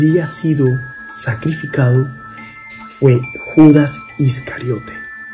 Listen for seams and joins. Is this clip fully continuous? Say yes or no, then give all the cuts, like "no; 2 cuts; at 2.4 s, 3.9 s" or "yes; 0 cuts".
yes; 0 cuts